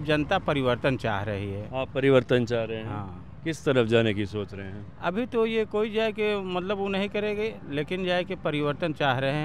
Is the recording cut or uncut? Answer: uncut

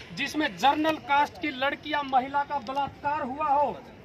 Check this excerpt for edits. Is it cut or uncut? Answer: uncut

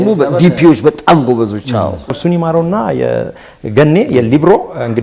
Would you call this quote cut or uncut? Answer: cut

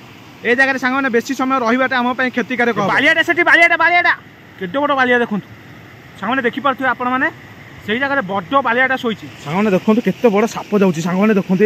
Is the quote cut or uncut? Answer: cut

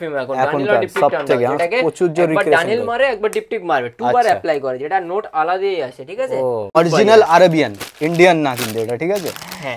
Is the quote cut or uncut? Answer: cut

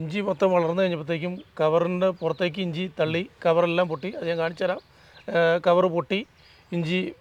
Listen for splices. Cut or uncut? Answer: uncut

